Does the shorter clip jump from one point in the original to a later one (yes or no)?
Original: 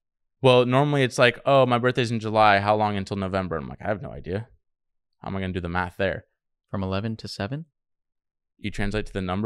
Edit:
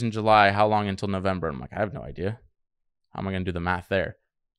no